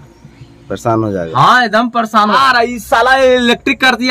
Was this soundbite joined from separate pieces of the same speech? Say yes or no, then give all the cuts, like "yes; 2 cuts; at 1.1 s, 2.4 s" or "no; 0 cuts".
yes; 1 cut; at 2.4 s